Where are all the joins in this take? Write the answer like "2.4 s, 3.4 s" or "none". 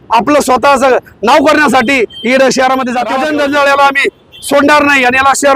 3.1 s